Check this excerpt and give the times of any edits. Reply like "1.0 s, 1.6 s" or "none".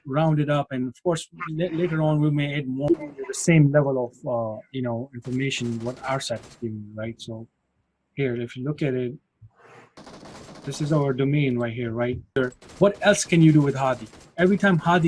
2.8 s, 12.4 s